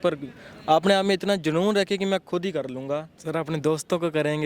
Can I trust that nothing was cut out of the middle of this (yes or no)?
no